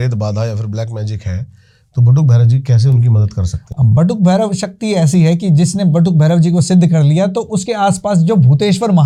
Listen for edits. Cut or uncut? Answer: uncut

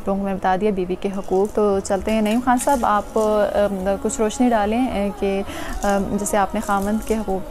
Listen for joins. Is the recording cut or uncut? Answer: uncut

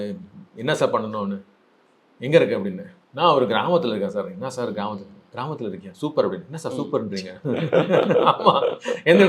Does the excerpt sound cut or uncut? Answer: uncut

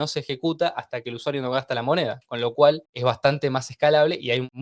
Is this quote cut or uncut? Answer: uncut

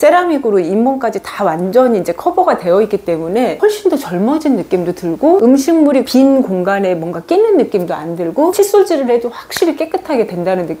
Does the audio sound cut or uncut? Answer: cut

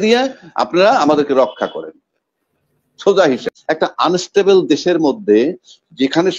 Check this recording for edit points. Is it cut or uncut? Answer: cut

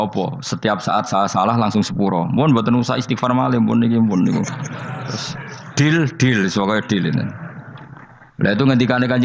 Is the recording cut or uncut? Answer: uncut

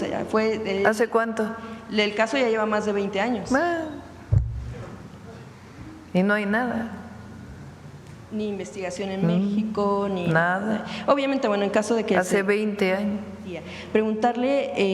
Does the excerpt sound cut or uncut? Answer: cut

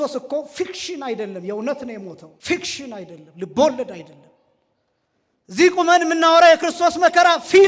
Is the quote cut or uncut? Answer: cut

